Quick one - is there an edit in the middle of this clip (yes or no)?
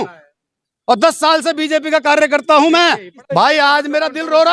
yes